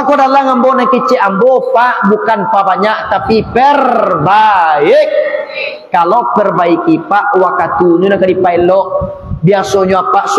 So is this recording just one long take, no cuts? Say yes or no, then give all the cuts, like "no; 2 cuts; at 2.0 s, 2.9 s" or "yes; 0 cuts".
yes; 0 cuts